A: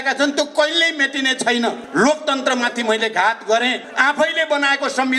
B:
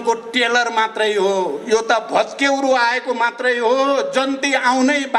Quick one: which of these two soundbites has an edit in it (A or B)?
A